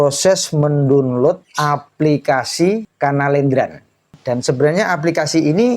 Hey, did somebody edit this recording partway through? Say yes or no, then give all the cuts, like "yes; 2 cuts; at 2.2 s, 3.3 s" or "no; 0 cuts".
yes; 3 cuts; at 1.5 s, 2.9 s, 4.1 s